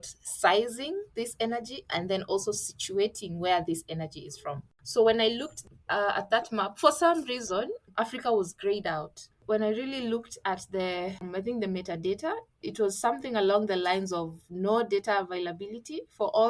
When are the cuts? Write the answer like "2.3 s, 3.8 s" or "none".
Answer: 4.7 s, 7.8 s, 9.4 s, 11.3 s, 12.6 s